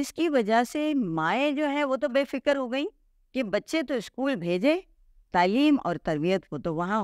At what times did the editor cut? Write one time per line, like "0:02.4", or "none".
none

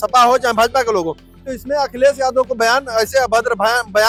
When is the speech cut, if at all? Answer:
none

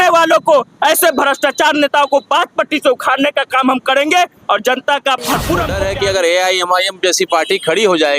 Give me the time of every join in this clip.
0:05.7

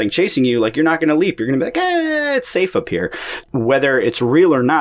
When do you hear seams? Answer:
0:03.3

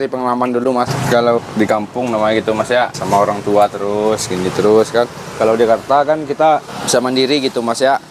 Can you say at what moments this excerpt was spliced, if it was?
0:01.0
0:03.0
0:06.7

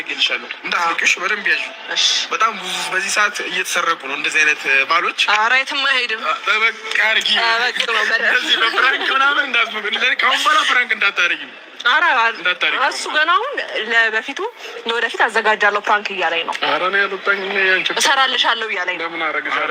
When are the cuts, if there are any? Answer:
none

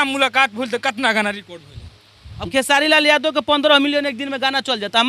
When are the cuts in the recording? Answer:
0:02.4

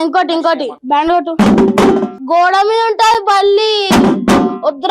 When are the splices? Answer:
0:01.2
0:02.1

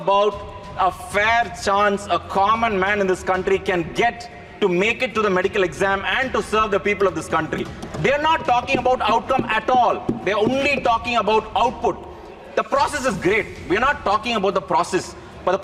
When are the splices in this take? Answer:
none

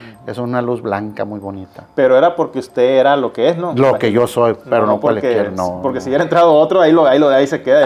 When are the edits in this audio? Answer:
none

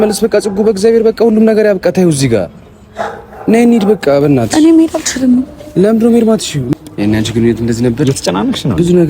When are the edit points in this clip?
0:06.7

